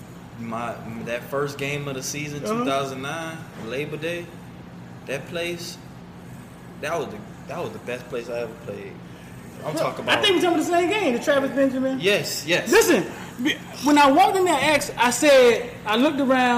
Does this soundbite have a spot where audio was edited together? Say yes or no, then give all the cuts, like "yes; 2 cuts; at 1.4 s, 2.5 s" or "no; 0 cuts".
no; 0 cuts